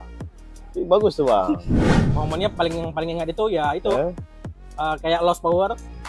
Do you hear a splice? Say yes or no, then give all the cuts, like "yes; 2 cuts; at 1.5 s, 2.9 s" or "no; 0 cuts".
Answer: yes; 1 cut; at 2.1 s